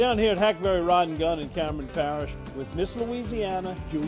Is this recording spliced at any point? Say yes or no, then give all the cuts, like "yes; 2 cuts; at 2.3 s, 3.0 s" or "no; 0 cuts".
yes; 1 cut; at 2.3 s